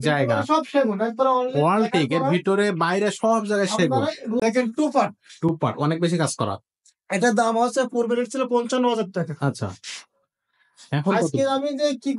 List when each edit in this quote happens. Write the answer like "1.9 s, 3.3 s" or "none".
4.4 s